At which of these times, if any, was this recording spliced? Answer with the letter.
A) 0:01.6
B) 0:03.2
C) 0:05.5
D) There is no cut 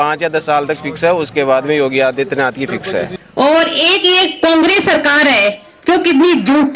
B